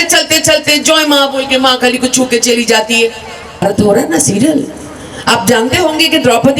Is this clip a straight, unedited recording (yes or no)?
no